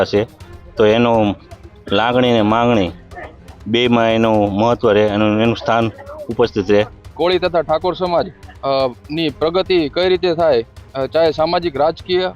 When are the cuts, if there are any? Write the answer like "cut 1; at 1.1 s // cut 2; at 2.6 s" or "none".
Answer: cut 1; at 7.1 s